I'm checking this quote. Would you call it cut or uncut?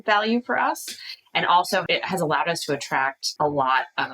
cut